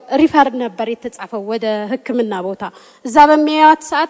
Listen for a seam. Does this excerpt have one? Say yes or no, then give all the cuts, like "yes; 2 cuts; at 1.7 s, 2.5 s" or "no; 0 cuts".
no; 0 cuts